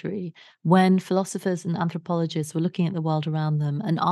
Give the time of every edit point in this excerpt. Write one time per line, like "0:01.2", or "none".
none